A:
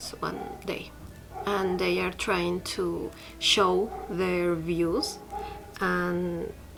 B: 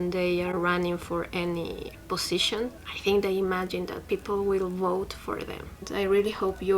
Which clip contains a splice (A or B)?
B